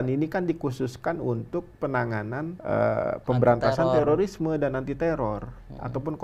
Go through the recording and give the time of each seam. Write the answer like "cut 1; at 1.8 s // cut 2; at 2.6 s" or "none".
cut 1; at 2.6 s